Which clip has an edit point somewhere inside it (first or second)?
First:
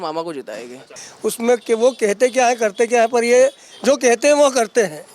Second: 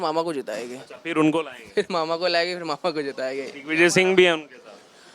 first